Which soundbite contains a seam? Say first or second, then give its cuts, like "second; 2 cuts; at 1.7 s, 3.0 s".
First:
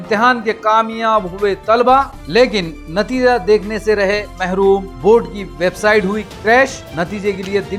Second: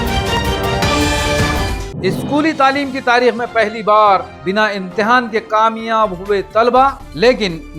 second; 1 cut; at 1.8 s